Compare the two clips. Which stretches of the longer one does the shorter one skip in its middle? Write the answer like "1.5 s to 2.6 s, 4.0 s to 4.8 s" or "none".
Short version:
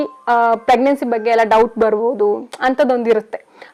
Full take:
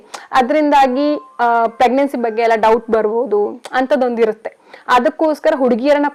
none